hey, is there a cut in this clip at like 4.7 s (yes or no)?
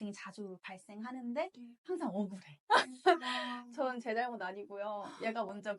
no